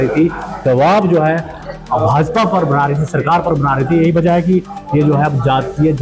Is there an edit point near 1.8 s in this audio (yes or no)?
no